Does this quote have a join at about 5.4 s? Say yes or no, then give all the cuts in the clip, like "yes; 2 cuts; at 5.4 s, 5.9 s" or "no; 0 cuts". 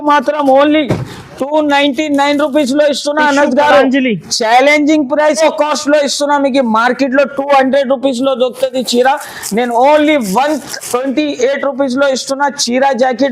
yes; 1 cut; at 5.4 s